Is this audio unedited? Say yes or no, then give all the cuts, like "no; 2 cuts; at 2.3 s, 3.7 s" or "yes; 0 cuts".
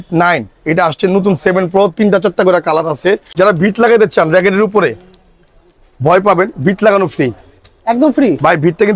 no; 1 cut; at 3.3 s